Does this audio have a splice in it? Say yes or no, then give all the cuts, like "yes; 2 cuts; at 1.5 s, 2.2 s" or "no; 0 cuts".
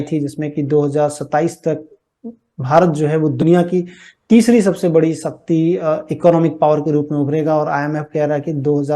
no; 0 cuts